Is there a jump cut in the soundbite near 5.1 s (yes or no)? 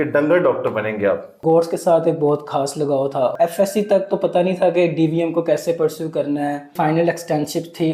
no